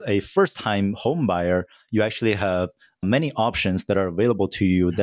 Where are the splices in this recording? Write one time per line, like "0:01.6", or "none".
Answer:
none

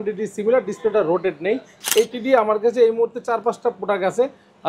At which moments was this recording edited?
0:01.7

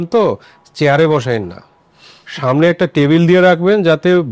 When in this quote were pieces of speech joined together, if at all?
none

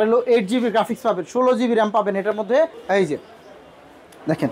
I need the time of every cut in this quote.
0:02.8

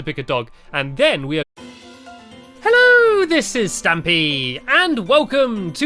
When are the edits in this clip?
none

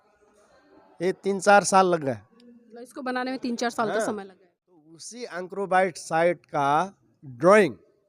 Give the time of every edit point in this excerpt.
0:04.9

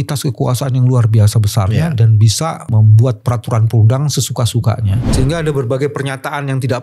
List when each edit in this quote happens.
0:02.7
0:05.0

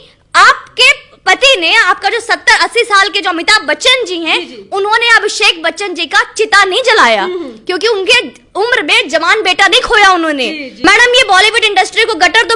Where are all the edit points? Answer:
0:10.7

